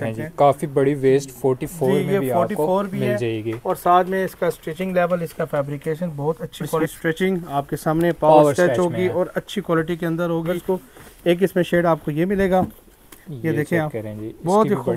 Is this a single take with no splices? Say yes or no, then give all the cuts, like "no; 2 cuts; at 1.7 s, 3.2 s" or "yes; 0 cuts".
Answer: no; 2 cuts; at 6.9 s, 10.5 s